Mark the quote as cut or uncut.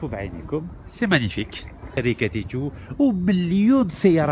cut